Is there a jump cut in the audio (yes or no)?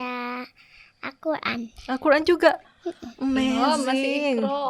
no